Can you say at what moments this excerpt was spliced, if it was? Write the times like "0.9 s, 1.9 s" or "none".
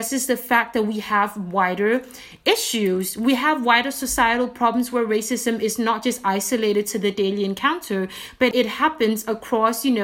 8.5 s